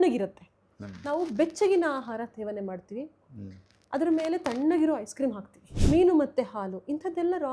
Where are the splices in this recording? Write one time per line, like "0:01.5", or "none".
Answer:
0:05.8